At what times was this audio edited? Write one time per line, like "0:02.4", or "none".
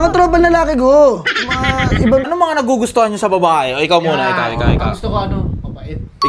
0:02.3